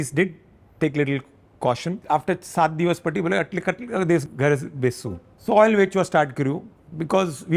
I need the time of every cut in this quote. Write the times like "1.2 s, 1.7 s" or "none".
2.0 s, 4.2 s, 5.3 s